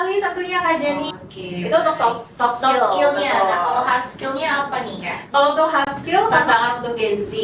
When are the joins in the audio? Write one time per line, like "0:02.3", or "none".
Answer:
0:01.1
0:06.5